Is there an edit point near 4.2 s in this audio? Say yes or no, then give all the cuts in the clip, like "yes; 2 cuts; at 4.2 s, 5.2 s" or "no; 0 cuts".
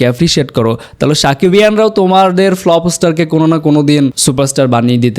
yes; 1 cut; at 4.2 s